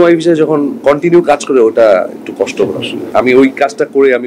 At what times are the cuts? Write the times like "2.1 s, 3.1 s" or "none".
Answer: 3.1 s